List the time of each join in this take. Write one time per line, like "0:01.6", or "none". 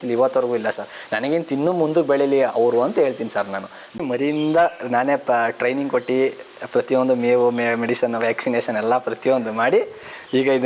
0:04.0